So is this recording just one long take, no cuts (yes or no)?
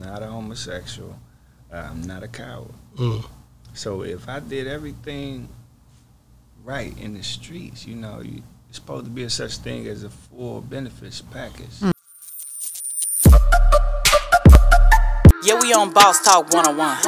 no